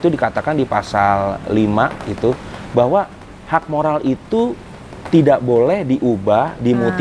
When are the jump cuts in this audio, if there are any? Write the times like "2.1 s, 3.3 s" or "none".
none